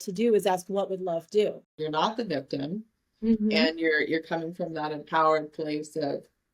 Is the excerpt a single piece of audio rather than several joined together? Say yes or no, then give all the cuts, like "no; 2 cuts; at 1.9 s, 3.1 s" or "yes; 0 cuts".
no; 1 cut; at 1.7 s